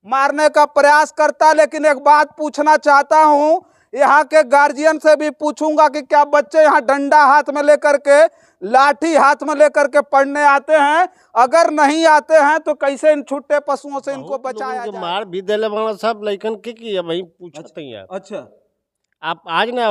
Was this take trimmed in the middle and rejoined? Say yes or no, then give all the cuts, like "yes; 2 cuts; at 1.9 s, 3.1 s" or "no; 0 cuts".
yes; 1 cut; at 14.6 s